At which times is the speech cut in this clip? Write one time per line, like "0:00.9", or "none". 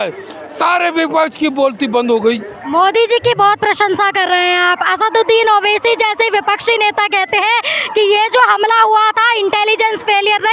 none